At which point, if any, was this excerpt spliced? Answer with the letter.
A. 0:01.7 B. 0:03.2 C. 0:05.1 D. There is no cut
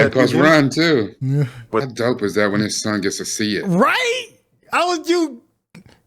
A